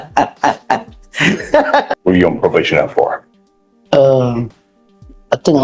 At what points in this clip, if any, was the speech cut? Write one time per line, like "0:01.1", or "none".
0:01.9